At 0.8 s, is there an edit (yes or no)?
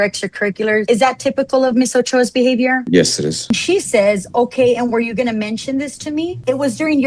yes